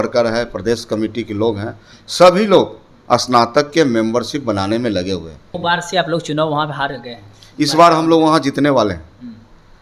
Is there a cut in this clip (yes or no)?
yes